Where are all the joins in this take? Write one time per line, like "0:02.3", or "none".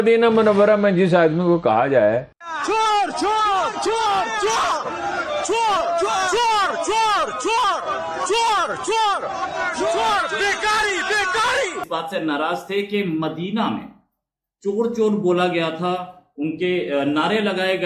0:02.3
0:11.8